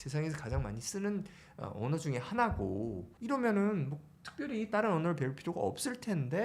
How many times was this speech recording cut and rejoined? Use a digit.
1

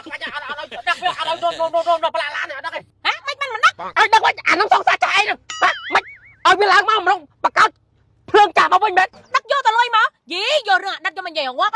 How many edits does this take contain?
2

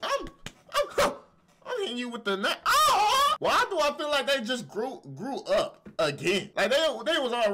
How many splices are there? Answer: 2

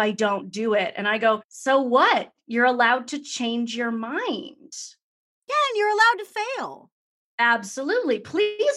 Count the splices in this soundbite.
1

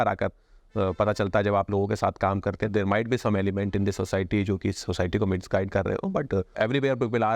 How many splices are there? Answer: 2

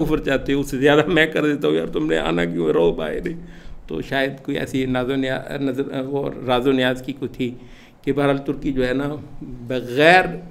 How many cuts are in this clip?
0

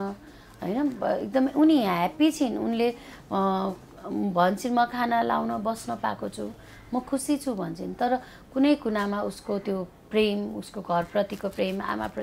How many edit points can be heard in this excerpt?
0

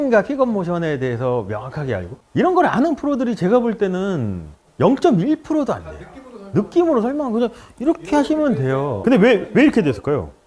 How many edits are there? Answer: 2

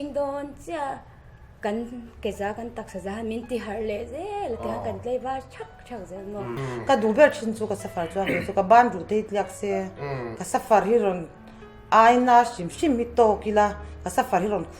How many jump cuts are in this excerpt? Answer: 1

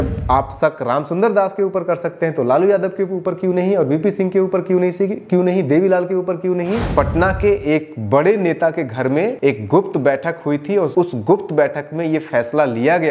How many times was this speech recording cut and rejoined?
3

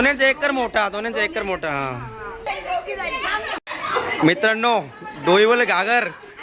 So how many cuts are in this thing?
1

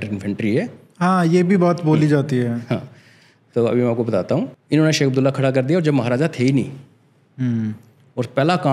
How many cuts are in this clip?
1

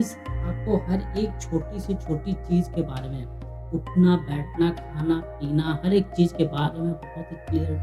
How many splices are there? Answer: 0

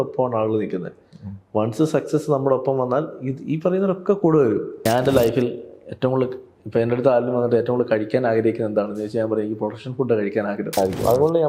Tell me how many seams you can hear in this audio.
2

